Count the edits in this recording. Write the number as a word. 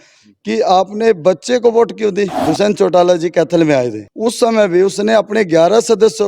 two